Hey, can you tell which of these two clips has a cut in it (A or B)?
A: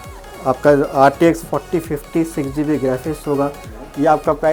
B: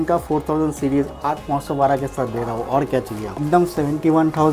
B